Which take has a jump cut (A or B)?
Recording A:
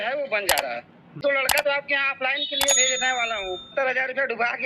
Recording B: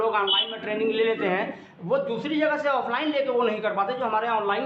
A